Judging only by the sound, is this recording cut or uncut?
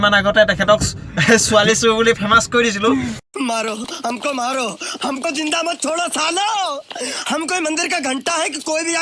uncut